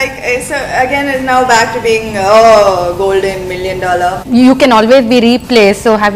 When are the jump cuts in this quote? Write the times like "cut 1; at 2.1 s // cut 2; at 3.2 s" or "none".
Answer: cut 1; at 4.2 s